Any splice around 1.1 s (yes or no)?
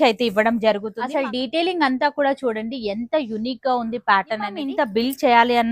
yes